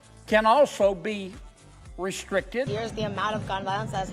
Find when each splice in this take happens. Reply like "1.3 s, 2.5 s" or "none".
2.7 s